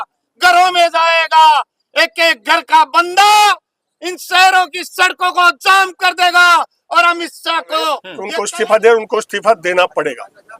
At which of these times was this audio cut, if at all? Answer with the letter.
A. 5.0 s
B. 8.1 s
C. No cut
B